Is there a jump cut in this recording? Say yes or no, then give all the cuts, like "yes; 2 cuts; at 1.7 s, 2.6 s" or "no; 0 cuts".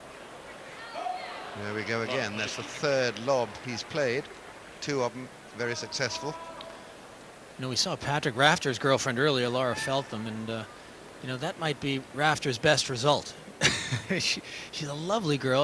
no; 0 cuts